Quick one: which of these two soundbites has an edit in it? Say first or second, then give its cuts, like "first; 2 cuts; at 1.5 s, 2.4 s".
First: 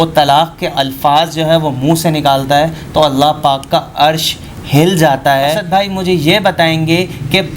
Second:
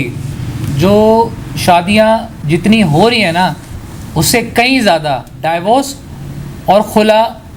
first; 1 cut; at 5.6 s